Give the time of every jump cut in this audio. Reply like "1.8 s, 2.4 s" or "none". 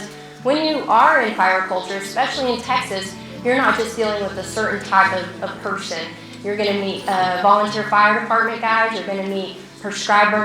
none